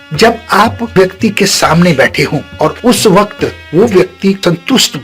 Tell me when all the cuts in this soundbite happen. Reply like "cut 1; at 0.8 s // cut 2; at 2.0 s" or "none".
cut 1; at 0.9 s

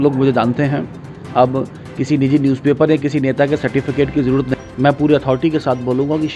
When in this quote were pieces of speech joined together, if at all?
cut 1; at 4.5 s

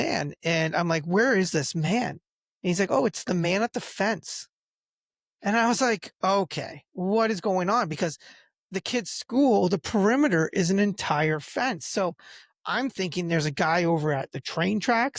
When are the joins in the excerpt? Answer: none

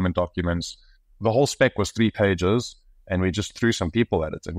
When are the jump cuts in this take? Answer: cut 1; at 1.2 s

